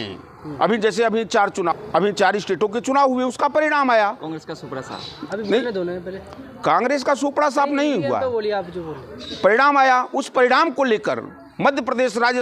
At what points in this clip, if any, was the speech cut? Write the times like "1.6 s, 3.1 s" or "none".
1.7 s